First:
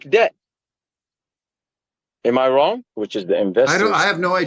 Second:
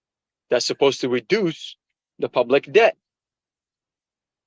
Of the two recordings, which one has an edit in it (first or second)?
first